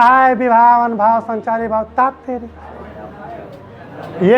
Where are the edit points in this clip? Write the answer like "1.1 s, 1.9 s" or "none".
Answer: 2.8 s